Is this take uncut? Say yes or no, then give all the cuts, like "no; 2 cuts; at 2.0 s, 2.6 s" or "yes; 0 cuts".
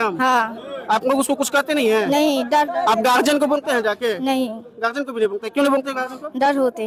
yes; 0 cuts